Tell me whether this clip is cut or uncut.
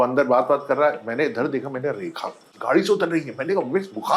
uncut